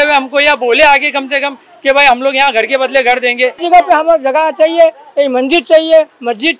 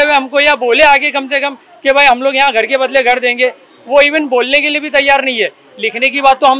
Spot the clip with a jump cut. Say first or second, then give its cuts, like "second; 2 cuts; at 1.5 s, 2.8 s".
first; 1 cut; at 3.6 s